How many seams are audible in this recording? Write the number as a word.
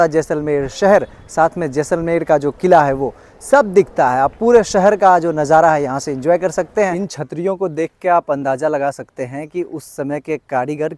one